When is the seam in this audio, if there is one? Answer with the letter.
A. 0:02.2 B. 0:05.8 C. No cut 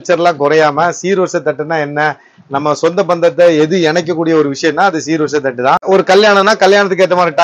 B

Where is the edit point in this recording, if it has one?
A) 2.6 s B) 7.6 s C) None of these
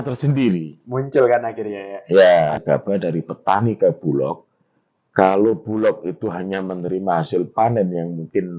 A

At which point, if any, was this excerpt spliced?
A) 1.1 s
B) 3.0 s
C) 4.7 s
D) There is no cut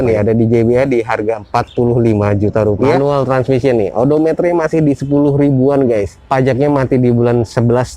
B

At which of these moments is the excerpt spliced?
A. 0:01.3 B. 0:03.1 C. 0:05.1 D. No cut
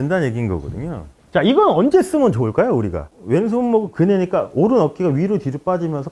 B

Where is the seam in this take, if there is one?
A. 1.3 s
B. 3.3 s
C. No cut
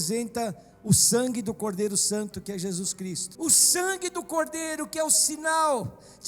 B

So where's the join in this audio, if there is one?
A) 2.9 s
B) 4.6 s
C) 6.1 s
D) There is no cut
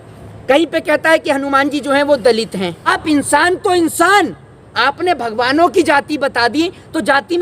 A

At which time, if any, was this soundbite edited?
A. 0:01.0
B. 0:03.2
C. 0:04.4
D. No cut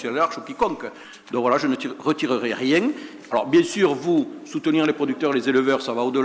A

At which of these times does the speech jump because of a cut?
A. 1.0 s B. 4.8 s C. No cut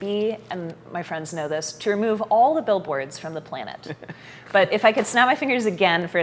C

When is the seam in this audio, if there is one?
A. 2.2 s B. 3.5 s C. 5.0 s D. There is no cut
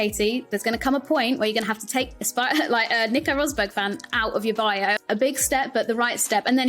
C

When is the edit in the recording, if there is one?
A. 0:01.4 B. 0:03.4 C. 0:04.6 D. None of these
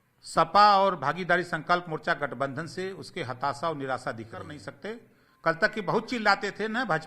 C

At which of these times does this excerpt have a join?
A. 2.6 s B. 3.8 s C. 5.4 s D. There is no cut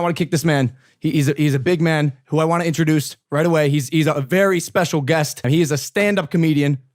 C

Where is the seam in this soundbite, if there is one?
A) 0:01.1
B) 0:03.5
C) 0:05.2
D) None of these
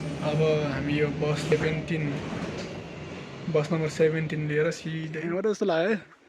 C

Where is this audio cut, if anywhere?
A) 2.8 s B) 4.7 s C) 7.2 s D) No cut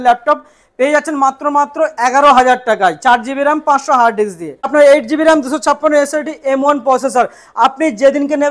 B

